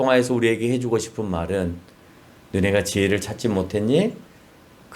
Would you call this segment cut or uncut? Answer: uncut